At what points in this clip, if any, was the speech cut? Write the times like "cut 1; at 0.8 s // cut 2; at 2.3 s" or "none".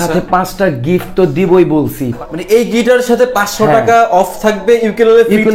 cut 1; at 2.0 s